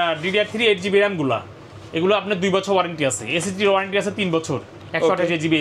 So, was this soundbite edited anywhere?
no; 0 cuts

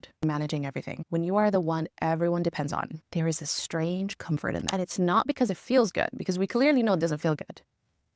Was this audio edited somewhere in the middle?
no; 0 cuts

